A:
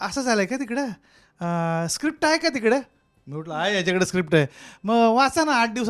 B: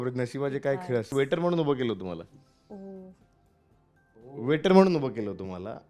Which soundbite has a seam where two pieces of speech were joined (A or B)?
B